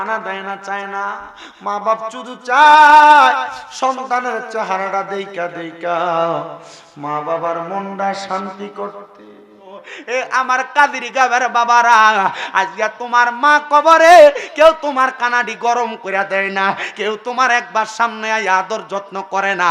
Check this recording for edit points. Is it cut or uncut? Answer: cut